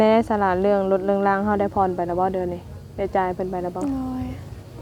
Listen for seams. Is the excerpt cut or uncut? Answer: uncut